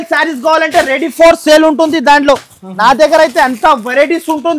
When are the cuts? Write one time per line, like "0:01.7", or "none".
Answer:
none